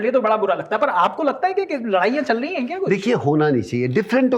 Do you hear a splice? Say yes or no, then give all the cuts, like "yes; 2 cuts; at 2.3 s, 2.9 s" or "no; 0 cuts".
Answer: no; 0 cuts